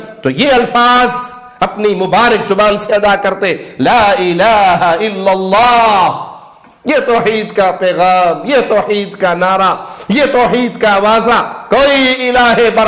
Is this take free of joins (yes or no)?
yes